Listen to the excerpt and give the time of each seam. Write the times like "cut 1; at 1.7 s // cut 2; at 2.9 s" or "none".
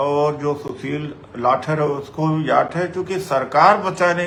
none